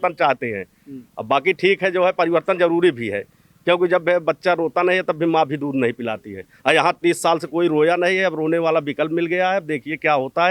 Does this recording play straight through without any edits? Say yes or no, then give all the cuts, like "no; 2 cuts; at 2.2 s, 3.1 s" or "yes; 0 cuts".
yes; 0 cuts